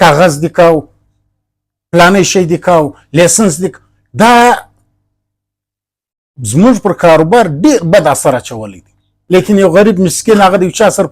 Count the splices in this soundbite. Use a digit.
1